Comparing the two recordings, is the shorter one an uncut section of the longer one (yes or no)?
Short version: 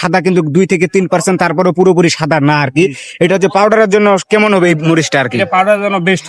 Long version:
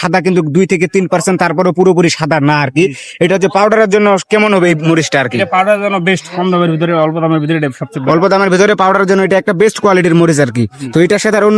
yes